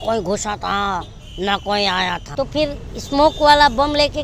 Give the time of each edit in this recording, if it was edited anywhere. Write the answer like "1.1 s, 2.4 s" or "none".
2.2 s